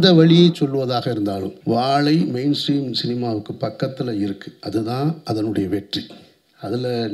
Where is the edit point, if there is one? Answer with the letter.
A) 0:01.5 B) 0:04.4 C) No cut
A